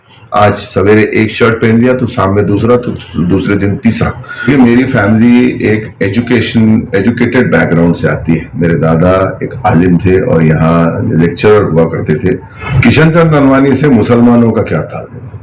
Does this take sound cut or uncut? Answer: cut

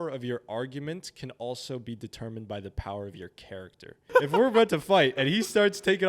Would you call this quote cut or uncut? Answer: cut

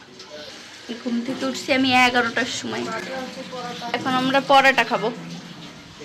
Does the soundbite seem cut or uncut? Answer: uncut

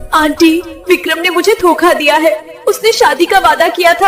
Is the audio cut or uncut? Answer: uncut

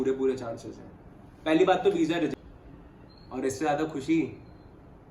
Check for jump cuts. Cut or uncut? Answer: cut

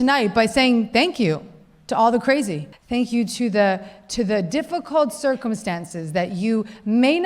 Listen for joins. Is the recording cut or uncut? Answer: cut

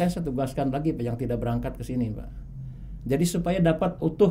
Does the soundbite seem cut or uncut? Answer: uncut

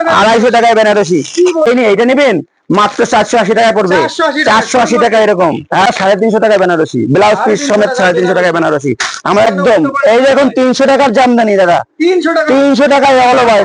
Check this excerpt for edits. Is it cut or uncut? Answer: cut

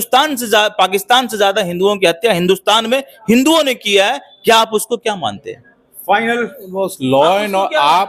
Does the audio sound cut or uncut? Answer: uncut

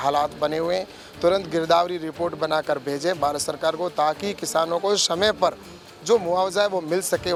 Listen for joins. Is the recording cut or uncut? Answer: uncut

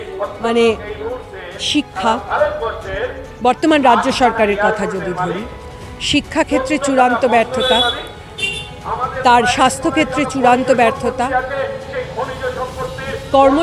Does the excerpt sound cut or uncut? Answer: uncut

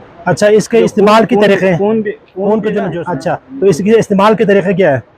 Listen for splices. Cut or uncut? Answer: cut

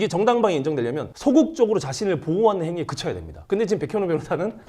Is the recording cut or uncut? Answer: cut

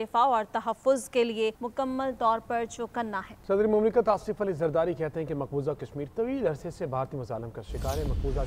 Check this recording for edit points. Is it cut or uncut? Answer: cut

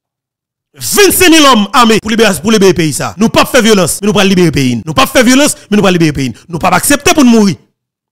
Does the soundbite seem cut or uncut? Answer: cut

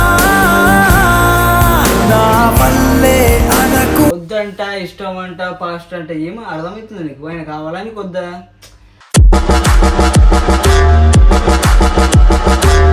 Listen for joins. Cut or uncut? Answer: cut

